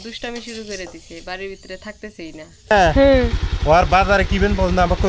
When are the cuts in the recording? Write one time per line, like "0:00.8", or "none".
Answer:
0:02.7